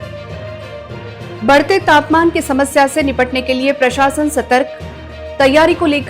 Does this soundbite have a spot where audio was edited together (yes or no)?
yes